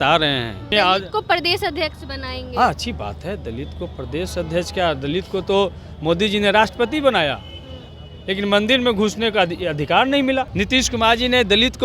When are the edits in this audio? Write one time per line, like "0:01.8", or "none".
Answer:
0:00.7
0:10.5